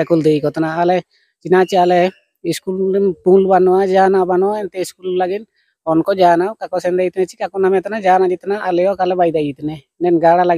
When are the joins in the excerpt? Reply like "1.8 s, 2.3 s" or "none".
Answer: none